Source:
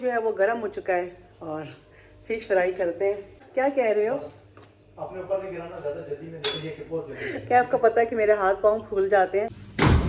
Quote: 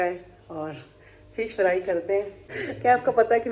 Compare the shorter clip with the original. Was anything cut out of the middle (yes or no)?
yes